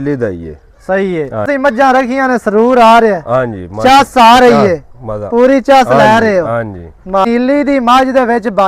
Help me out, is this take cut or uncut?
cut